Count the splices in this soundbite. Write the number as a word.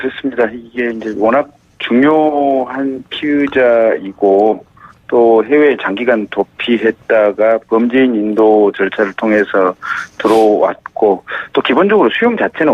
one